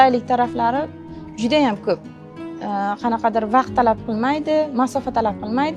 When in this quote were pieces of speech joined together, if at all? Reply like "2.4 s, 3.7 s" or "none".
none